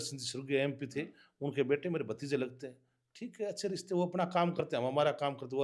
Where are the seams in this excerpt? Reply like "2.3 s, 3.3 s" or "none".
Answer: none

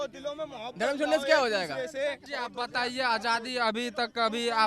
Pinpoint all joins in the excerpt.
2.3 s

